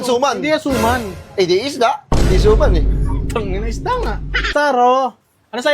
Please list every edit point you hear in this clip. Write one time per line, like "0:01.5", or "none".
0:04.5